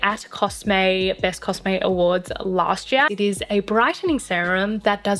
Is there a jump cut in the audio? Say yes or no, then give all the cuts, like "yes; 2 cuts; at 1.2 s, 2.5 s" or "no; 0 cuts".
yes; 1 cut; at 3.1 s